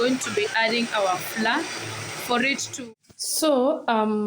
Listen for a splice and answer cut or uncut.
cut